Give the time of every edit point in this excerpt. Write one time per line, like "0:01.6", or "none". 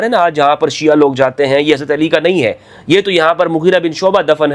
none